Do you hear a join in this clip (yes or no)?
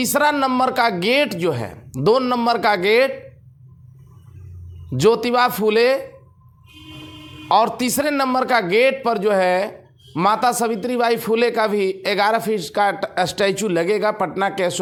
no